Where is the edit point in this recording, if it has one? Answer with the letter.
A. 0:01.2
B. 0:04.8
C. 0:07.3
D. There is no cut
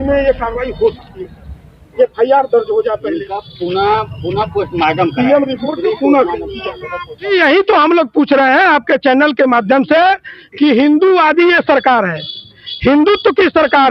C